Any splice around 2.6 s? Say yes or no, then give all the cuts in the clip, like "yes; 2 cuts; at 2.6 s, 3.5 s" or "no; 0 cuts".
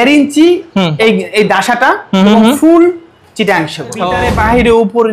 no; 1 cut; at 4.1 s